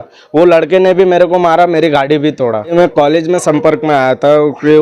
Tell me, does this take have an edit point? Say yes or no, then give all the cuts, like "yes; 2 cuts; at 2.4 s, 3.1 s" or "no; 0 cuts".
yes; 1 cut; at 2.7 s